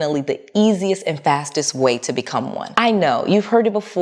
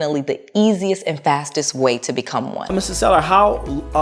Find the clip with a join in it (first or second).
second